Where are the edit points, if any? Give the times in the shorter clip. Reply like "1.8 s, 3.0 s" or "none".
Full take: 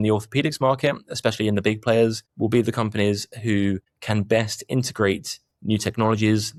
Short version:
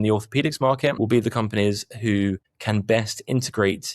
1.0 s

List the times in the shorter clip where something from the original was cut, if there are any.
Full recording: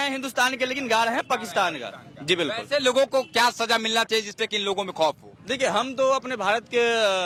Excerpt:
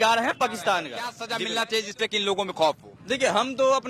1.3 s

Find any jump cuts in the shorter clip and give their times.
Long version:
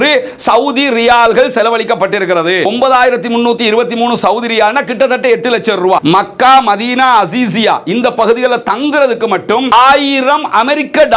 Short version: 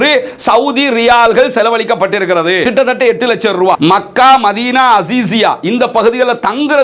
2.6 s

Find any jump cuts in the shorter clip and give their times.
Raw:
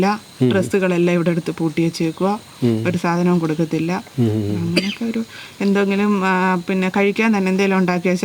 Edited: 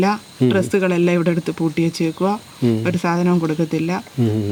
none

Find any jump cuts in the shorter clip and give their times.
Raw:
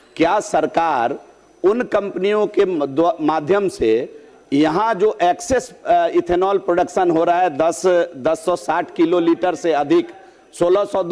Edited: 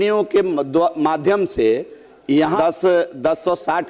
2.5 s

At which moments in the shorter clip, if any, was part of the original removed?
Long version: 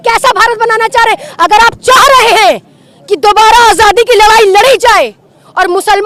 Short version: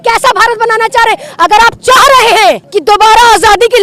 2.7 s

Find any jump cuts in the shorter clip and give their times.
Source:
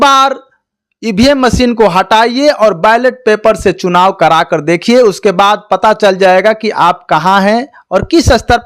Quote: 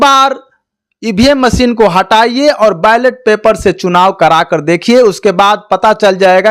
none

